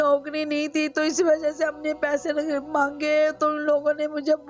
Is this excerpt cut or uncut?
uncut